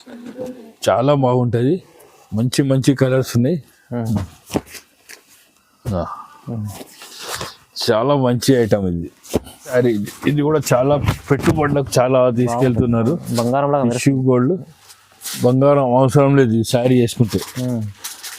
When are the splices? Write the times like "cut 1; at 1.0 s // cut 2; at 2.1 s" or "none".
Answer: cut 1; at 9.7 s